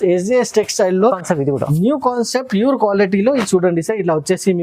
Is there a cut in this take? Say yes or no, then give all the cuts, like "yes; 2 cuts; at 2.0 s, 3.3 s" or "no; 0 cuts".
yes; 1 cut; at 1.2 s